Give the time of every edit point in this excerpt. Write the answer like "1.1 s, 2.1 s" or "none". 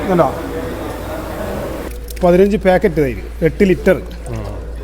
1.9 s